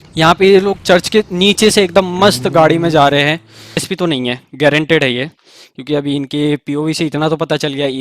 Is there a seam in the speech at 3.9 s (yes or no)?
yes